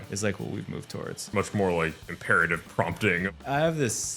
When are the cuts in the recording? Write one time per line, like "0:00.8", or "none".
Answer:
0:01.2
0:02.1
0:03.4